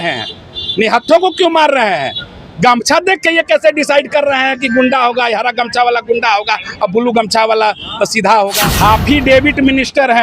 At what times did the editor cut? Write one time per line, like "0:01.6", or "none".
0:08.6